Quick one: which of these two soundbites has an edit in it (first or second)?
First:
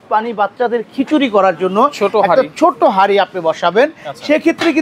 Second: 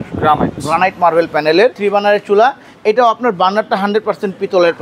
second